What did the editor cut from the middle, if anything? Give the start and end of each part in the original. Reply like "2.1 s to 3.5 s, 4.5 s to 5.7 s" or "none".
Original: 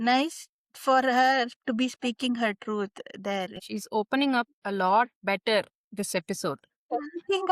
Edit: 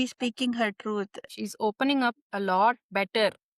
3.1 s to 3.6 s